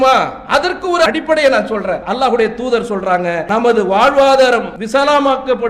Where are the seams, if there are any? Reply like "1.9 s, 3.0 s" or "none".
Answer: 1.1 s, 2.1 s, 3.4 s, 4.8 s

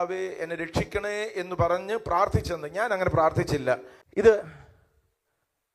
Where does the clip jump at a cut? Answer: 3.5 s

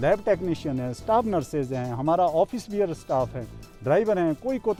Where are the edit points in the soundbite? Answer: none

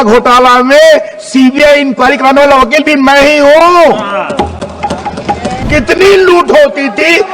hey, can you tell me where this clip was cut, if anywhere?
5.6 s

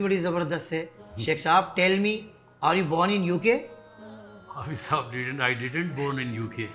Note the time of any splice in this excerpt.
none

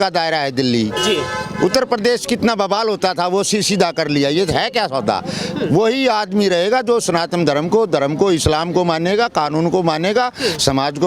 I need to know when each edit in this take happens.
none

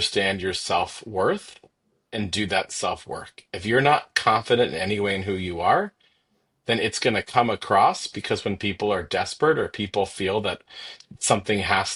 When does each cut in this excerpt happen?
none

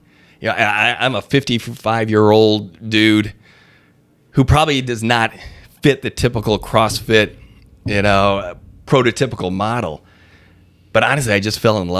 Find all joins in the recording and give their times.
none

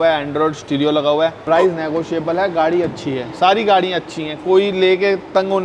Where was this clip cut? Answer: 1.4 s

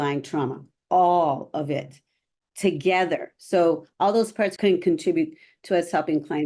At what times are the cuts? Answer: 4.5 s

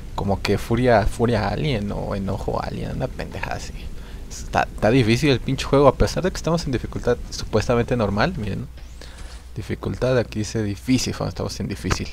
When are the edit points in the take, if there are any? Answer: 5.9 s

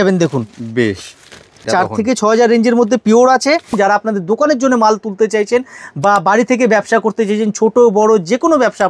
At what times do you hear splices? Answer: 1.7 s, 3.7 s

